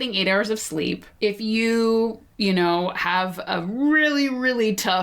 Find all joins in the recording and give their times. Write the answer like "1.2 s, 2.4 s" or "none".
1.1 s, 2.2 s